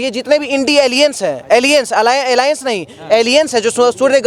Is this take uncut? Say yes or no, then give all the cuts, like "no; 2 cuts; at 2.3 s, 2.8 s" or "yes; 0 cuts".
yes; 0 cuts